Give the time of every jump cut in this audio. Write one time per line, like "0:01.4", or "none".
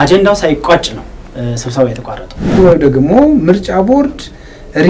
0:02.5